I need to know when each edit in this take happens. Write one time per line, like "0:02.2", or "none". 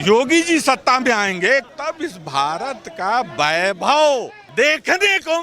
0:01.7
0:04.4